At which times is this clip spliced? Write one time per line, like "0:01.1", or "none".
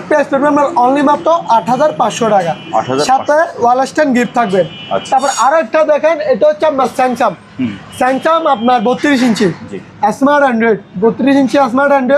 none

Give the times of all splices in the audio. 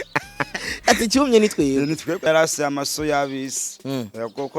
0:02.3

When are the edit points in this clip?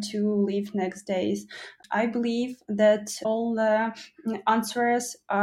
0:01.8
0:03.2

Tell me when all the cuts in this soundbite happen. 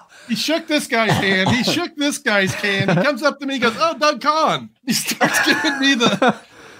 0:04.7

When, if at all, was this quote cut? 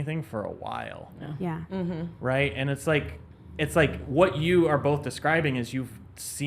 none

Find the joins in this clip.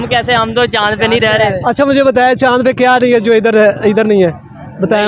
none

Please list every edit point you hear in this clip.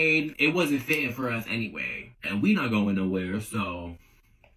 none

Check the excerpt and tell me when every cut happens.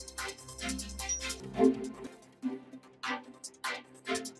none

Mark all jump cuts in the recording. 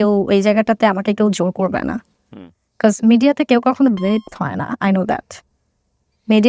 none

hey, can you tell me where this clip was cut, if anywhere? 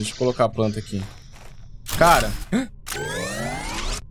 none

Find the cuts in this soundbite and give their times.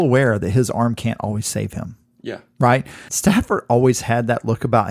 0:03.0

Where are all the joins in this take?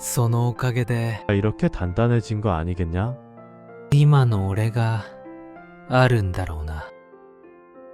0:07.0

